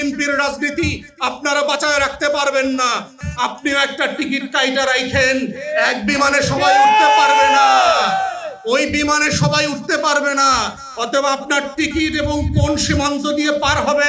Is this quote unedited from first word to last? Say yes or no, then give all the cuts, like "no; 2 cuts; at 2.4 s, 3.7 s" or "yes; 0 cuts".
no; 1 cut; at 3.2 s